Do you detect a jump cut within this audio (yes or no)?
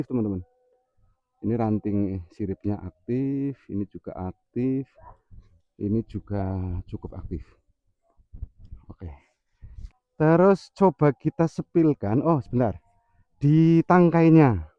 no